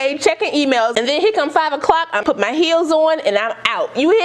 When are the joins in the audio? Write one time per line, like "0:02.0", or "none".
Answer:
0:02.2